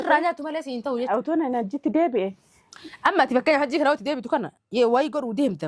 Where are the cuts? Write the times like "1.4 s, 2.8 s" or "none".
1.1 s